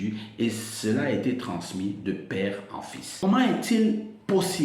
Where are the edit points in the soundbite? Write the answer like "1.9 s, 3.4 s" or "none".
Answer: 3.1 s